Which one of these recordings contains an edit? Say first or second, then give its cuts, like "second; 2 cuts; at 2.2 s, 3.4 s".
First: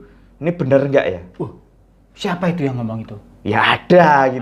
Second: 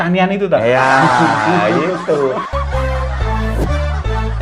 second; 1 cut; at 2.4 s